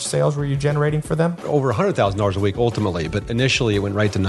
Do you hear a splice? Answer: yes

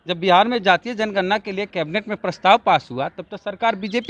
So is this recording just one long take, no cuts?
yes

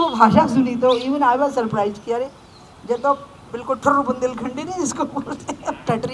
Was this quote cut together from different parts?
no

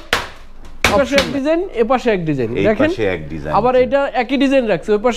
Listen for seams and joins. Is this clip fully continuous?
no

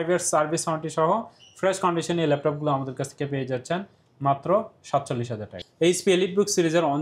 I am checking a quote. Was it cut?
yes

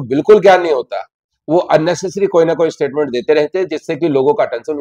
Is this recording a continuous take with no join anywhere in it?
yes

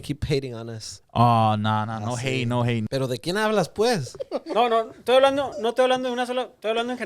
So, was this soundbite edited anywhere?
yes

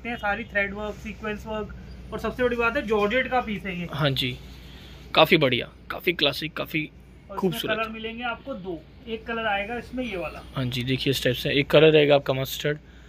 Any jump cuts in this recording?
no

